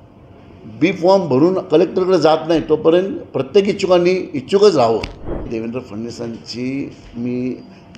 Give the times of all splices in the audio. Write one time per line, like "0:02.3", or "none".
0:05.5